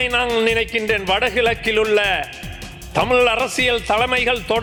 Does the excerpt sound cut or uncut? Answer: uncut